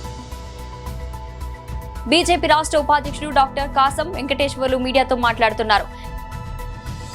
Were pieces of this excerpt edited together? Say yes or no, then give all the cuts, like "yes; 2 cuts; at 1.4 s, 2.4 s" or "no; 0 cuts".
no; 0 cuts